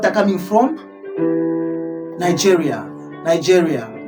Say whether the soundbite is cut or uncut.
uncut